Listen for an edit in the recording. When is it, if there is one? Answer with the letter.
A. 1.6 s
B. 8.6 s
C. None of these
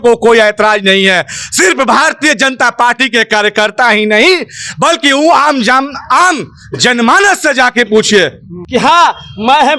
B